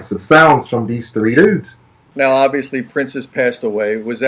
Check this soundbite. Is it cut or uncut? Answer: cut